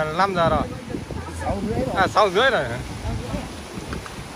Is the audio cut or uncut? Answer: uncut